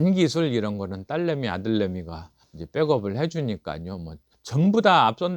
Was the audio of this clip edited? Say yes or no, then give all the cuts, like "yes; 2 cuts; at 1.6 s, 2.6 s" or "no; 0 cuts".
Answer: no; 0 cuts